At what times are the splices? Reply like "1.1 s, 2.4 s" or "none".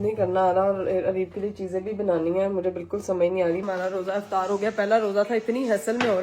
3.6 s